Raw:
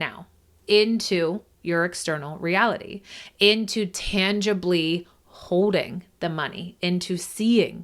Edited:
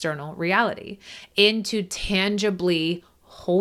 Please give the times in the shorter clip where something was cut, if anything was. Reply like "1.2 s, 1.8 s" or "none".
none